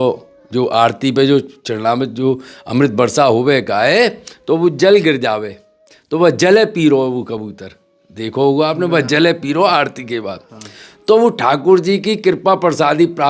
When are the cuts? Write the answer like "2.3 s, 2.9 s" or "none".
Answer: none